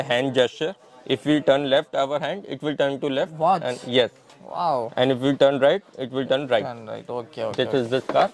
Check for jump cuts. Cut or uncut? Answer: uncut